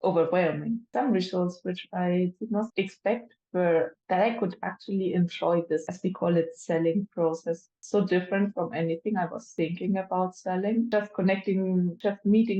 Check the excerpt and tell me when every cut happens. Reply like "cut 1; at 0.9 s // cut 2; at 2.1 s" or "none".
cut 1; at 2.7 s